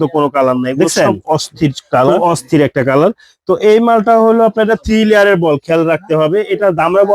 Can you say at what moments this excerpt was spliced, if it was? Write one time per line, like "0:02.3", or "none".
0:02.2